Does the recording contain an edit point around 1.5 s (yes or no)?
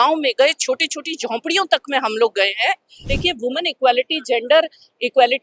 no